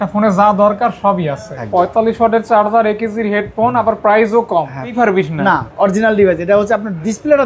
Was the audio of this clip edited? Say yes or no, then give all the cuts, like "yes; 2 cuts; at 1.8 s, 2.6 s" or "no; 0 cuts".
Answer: yes; 2 cuts; at 1.6 s, 4.9 s